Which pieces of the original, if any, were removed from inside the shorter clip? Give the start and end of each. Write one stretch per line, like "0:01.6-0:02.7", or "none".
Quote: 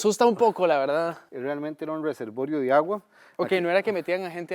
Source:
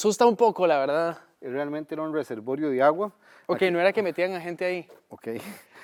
0:01.3-0:01.4